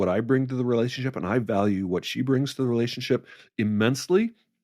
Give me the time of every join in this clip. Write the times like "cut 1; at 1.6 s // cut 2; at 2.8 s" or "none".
cut 1; at 3.4 s

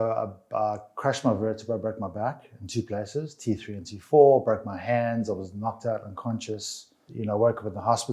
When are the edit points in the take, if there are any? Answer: cut 1; at 7.1 s

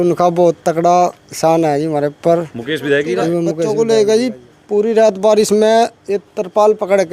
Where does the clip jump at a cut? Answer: cut 1; at 3.7 s

